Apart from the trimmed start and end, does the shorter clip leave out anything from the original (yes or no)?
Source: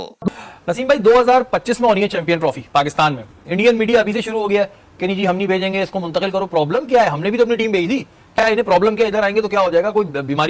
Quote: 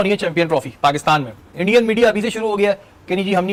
no